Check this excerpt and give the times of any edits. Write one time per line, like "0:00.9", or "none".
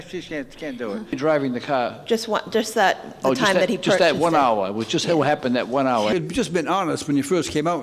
0:01.1
0:06.1